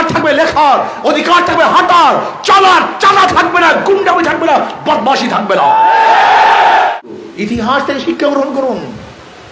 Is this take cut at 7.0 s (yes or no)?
yes